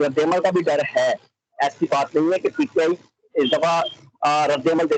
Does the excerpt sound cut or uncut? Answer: uncut